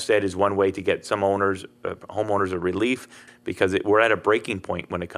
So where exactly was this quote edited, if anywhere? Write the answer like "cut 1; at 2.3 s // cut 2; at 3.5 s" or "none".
cut 1; at 3.2 s